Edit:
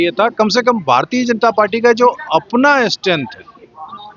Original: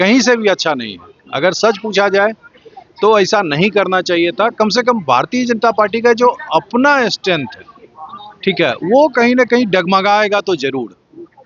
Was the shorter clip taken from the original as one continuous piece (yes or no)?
yes